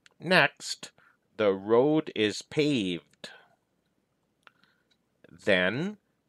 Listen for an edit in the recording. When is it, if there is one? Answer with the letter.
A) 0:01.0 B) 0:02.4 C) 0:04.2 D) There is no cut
C